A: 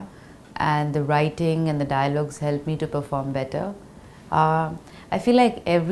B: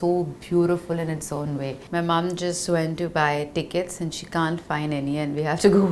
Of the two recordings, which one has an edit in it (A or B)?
B